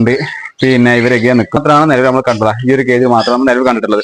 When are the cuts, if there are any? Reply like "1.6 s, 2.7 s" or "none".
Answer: 1.6 s